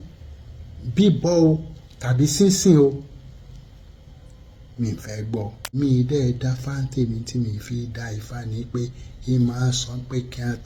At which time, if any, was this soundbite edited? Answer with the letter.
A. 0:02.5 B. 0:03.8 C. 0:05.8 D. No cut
C